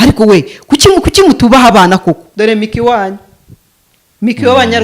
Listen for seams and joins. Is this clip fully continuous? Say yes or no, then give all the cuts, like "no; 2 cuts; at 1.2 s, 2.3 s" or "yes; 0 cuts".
no; 1 cut; at 2.3 s